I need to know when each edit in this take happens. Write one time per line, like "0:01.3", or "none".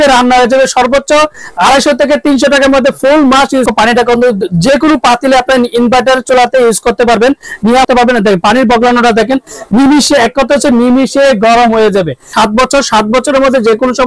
0:03.7
0:07.8
0:12.3